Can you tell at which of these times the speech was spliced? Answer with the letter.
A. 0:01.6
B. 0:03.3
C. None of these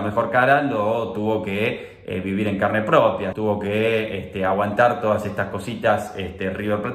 B